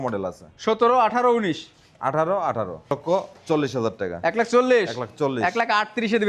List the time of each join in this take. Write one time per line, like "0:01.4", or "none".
0:02.9